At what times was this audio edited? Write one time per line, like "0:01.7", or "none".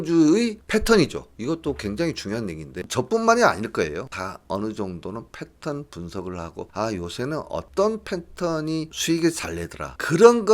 0:02.8
0:04.1